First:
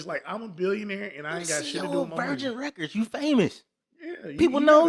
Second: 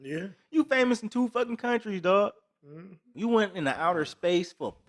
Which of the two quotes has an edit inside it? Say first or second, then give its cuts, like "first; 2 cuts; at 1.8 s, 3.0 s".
second; 1 cut; at 3.0 s